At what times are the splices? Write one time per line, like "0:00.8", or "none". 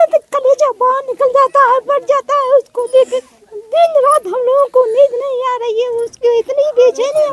none